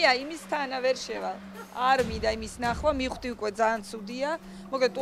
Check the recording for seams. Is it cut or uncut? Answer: uncut